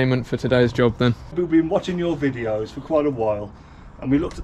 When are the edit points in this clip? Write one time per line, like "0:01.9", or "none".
0:01.3